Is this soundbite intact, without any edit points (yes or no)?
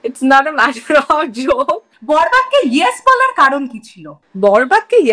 no